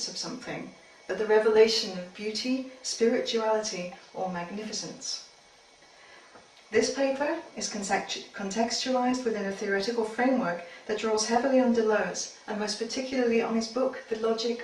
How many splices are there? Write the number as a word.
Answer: one